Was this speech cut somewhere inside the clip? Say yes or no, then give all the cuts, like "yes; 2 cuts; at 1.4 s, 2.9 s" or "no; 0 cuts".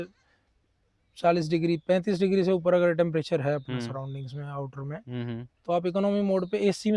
no; 0 cuts